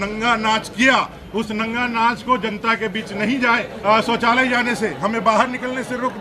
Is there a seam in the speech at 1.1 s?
no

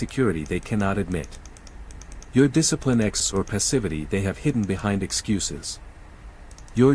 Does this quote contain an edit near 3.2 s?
yes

